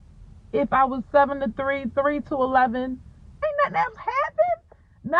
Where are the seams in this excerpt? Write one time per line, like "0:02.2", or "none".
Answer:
0:03.3